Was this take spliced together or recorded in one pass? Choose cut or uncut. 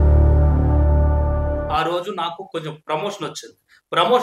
uncut